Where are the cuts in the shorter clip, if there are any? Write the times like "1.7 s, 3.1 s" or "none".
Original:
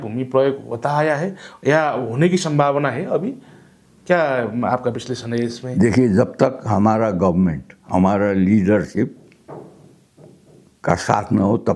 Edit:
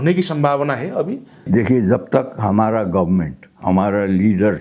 1.3 s